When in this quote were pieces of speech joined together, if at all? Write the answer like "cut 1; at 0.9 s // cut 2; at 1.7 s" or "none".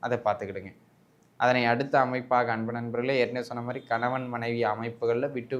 none